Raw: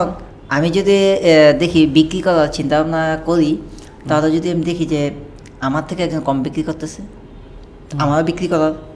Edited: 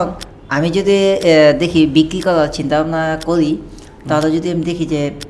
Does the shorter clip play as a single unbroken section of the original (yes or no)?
yes